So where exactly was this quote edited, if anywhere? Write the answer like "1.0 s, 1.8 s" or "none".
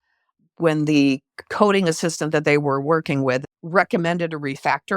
3.4 s